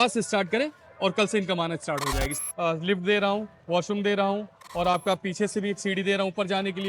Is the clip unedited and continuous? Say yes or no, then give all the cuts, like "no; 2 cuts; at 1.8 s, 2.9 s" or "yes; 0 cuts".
no; 1 cut; at 2.3 s